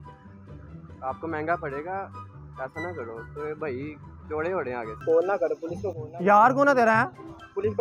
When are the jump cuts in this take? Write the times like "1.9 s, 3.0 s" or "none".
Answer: 4.9 s